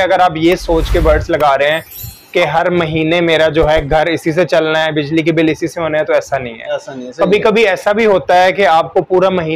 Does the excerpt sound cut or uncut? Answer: uncut